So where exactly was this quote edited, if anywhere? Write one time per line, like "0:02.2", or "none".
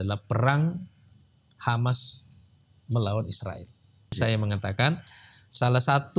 0:04.2